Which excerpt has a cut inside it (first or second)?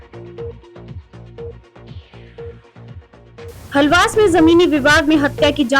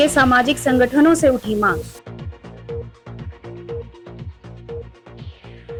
first